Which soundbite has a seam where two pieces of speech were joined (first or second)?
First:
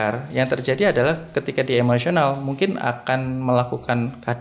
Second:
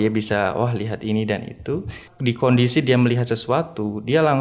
second